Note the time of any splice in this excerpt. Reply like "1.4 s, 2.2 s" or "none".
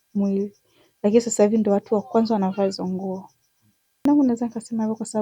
4.0 s